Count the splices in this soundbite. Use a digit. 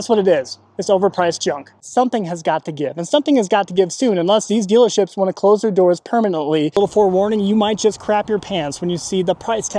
2